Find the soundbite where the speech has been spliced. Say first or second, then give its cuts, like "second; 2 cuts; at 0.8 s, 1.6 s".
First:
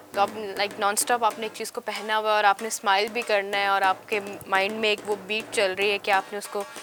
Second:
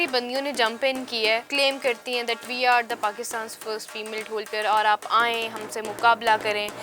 second; 1 cut; at 1.5 s